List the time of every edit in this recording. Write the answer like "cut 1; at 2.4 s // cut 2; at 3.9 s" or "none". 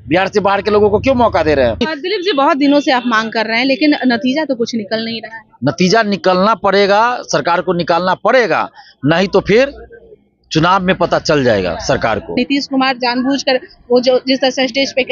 cut 1; at 2.1 s // cut 2; at 12.4 s